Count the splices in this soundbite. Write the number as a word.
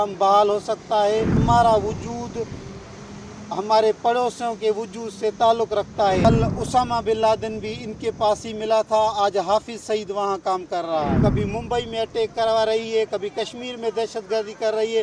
three